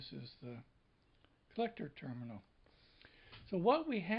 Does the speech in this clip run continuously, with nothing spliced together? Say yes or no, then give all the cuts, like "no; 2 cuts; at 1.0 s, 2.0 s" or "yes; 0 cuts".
yes; 0 cuts